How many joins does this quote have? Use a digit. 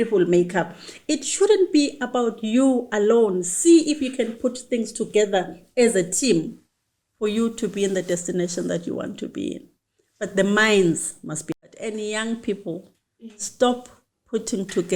1